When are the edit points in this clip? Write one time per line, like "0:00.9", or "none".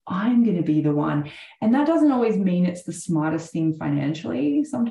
none